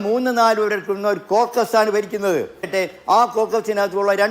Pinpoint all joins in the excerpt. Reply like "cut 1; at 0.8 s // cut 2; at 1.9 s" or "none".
cut 1; at 2.7 s